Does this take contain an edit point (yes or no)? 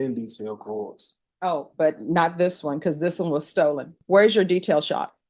yes